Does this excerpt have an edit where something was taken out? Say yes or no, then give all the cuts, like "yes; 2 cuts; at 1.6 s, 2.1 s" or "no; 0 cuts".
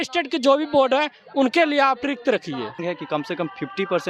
yes; 1 cut; at 2.8 s